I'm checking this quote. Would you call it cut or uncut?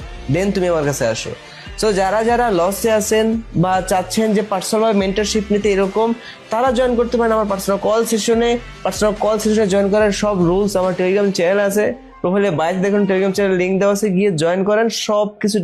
uncut